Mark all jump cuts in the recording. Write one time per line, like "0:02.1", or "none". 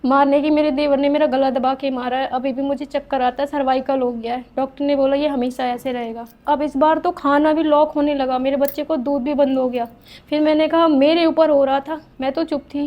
0:06.4